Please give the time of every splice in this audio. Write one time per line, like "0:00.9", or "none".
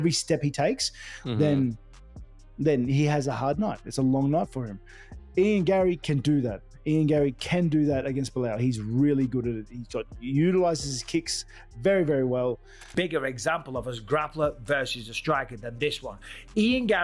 0:12.8